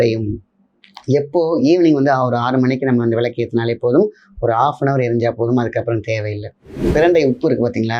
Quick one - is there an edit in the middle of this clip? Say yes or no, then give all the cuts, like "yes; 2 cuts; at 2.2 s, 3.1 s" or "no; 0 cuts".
yes; 1 cut; at 6.9 s